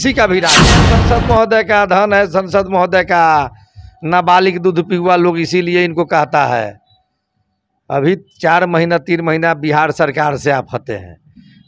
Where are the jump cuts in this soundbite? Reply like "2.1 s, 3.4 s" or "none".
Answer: 0.9 s